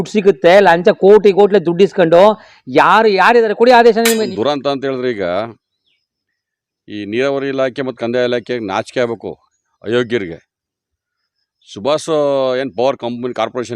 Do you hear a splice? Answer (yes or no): yes